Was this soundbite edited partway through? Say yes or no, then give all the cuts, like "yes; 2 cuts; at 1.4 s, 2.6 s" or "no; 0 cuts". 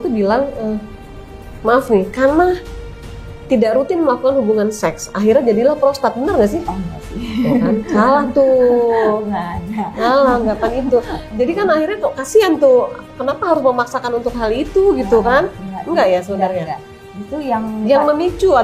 no; 0 cuts